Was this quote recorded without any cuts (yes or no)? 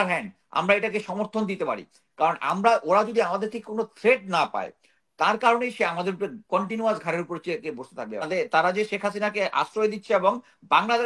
no